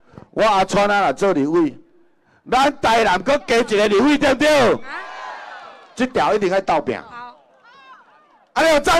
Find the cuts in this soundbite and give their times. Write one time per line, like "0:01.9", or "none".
none